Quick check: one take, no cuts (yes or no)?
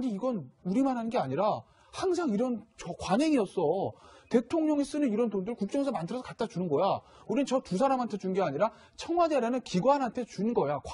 yes